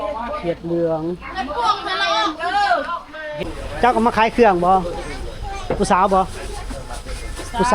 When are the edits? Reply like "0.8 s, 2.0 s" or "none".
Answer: 3.5 s